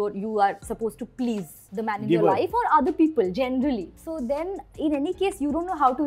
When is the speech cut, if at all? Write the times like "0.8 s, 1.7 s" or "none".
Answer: 1.6 s, 4.0 s